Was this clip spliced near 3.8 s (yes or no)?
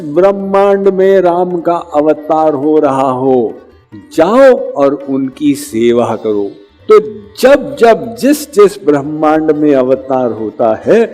no